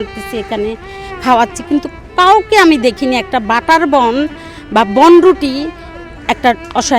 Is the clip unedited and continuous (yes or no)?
yes